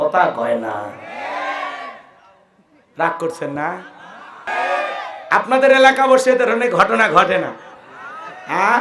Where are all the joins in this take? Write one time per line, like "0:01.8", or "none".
0:04.5

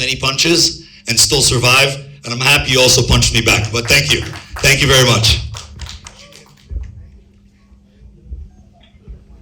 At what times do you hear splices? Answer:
none

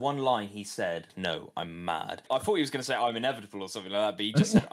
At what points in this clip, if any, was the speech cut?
0:01.1
0:02.2

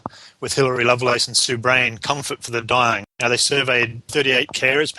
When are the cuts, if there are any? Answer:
0:03.1
0:04.1

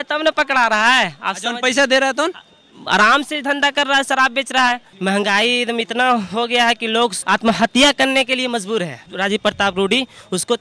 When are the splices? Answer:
0:04.9
0:07.2
0:09.1

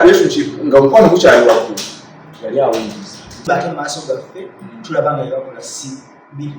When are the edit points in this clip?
0:03.5

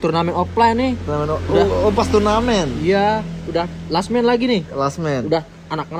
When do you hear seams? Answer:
none

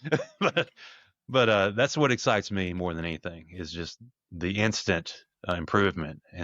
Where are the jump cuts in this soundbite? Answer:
none

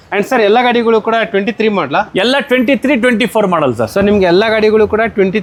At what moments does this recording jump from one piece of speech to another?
none

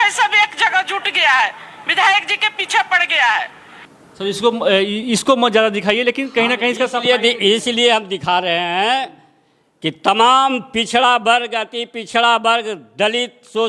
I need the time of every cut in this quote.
none

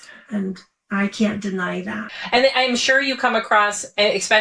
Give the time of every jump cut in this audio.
0:02.0

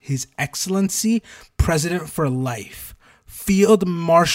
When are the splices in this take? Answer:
none

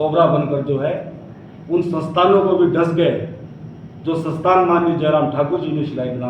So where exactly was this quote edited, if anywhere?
none

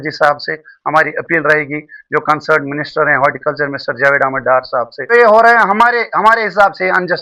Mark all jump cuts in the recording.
0:05.1

